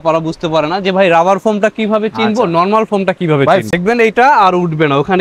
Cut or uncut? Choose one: cut